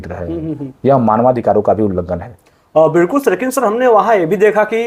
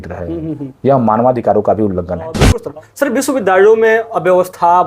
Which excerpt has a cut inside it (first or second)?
second